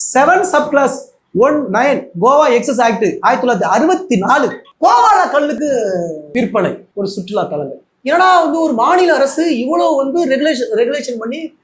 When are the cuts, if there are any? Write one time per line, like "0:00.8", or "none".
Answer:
0:06.2
0:06.8